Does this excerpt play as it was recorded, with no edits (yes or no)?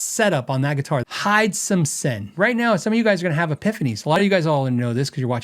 no